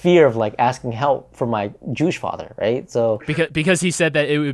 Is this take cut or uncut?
uncut